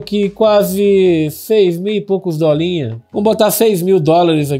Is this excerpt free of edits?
yes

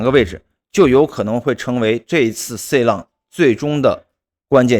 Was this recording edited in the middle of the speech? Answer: no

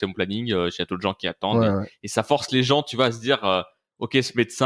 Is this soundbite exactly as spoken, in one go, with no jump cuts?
yes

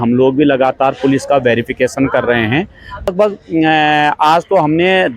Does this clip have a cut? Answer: yes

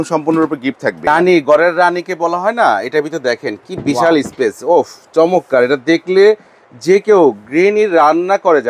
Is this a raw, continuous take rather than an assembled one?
no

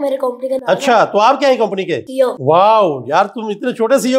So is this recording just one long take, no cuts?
no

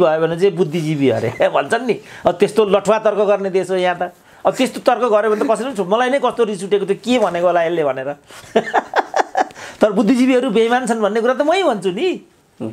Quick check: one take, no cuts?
yes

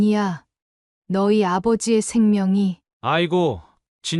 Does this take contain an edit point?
no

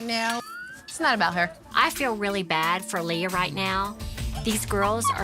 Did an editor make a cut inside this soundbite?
yes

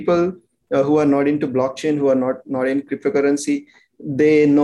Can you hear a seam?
no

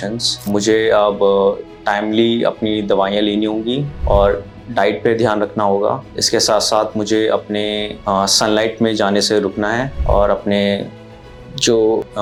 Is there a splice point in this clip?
no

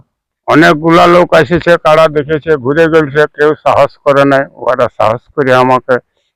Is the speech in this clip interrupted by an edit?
no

